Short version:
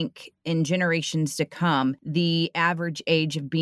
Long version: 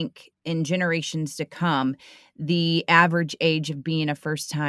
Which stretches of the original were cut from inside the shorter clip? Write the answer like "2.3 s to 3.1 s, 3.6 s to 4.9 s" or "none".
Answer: 2.0 s to 2.4 s

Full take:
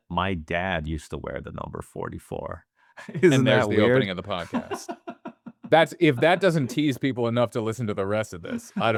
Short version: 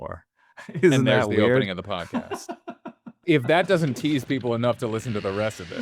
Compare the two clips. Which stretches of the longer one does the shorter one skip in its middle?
5.6 s to 5.9 s

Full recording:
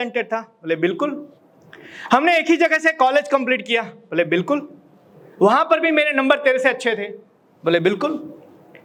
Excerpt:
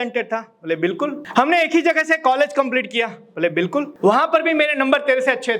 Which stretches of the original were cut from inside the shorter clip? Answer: 1.2 s to 2.0 s, 4.7 s to 5.3 s

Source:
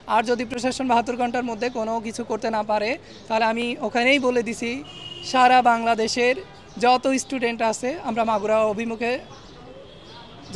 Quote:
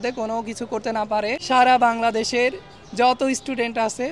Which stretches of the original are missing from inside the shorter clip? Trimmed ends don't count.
3.0 s to 5.2 s

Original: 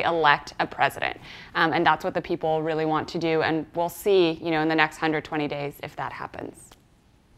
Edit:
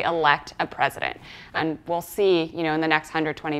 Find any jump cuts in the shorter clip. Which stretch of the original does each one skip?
1.6 s to 3.4 s

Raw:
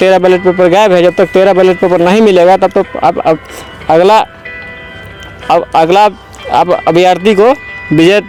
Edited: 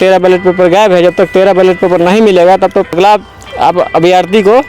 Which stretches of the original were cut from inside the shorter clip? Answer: 3.0 s to 5.9 s

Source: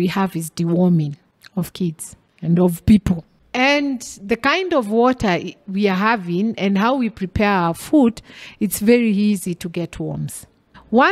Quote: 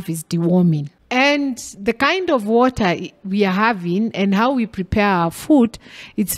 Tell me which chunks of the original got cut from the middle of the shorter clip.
1.2 s to 3.4 s

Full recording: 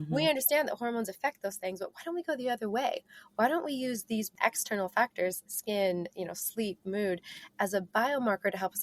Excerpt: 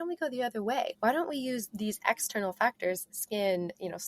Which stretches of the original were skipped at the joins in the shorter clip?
3.0 s to 3.3 s

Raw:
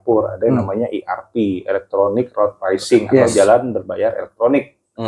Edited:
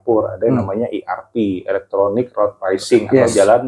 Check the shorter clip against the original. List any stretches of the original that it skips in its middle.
none

